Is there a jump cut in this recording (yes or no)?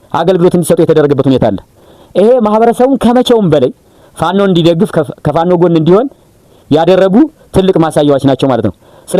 no